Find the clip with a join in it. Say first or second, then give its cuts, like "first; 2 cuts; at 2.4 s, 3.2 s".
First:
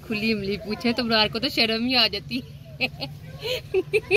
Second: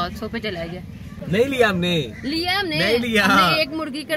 second; 1 cut; at 1.2 s